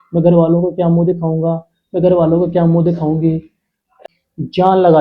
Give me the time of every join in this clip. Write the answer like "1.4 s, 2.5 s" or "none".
4.0 s